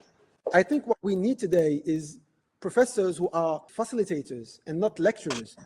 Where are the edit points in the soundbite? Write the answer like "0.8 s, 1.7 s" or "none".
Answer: 3.7 s